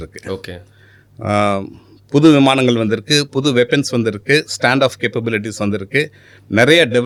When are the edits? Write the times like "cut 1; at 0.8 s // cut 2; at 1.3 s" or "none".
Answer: none